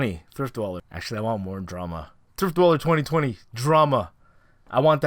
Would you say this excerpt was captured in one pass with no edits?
no; 1 cut; at 0.9 s

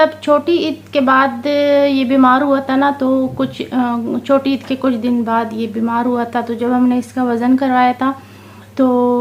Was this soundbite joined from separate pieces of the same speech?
no; 0 cuts

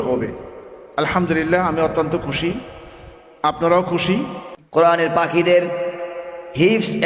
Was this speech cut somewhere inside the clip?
yes; 1 cut; at 4.6 s

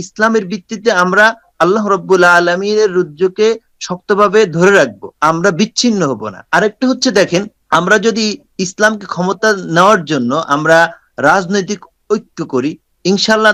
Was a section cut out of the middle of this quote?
no; 0 cuts

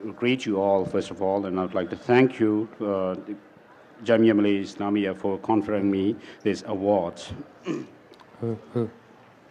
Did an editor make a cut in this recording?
no; 0 cuts

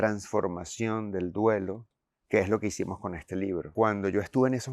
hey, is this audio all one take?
no; 1 cut; at 3.7 s

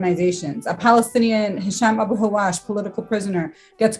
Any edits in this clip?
no; 0 cuts

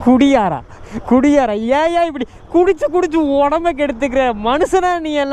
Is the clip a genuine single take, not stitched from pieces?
yes; 0 cuts

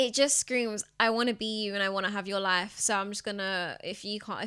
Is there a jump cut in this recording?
no; 0 cuts

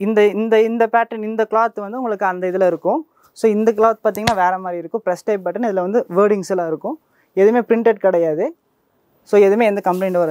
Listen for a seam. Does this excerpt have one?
no; 0 cuts

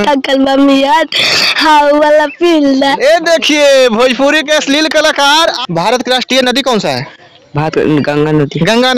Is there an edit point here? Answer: yes; 1 cut; at 5.6 s

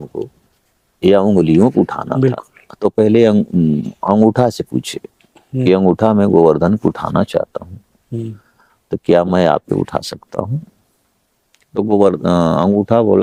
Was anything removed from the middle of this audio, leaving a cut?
no; 0 cuts

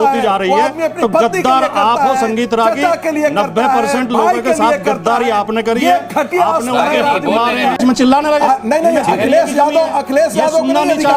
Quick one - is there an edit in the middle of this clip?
yes; 1 cut; at 7.8 s

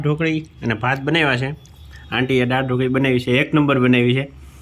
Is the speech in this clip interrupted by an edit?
no; 0 cuts

